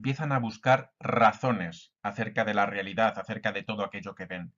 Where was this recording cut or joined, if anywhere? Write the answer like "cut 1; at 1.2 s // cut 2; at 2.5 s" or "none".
cut 1; at 1.9 s

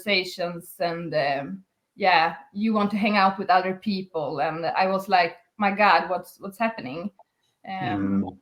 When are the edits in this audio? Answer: none

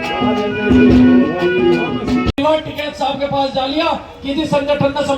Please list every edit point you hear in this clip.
cut 1; at 2.4 s

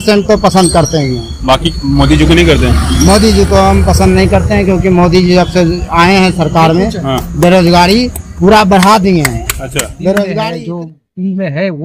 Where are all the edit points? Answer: cut 1; at 10.4 s

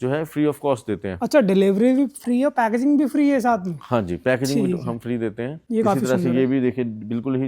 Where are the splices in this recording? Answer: cut 1; at 5.6 s

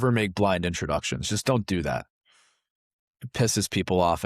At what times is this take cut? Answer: cut 1; at 2.9 s

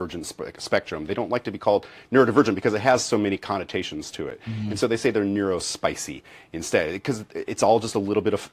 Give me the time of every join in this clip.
none

